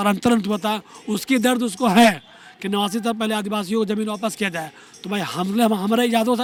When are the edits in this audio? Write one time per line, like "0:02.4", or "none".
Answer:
none